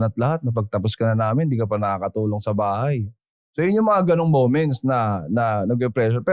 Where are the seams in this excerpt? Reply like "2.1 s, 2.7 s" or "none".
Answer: none